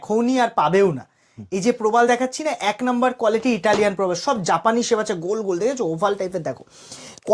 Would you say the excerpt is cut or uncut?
uncut